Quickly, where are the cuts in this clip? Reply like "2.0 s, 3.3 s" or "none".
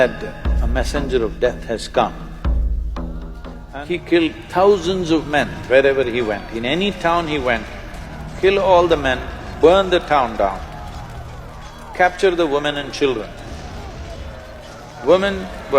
3.5 s

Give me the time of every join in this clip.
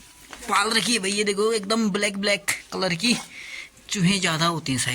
none

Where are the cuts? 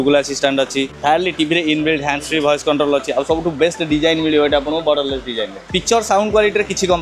0.9 s, 5.7 s

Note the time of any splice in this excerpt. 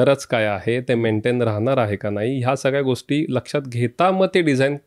none

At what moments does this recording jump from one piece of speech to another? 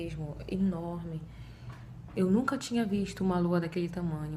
none

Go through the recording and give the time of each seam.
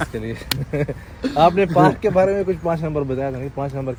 none

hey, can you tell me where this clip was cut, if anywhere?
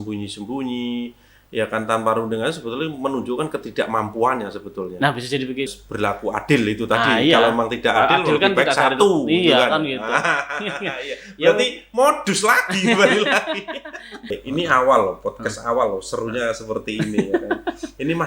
5.7 s, 14.4 s

